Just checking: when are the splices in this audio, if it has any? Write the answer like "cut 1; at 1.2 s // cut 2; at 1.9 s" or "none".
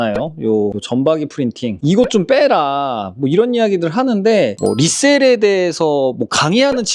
cut 1; at 4.6 s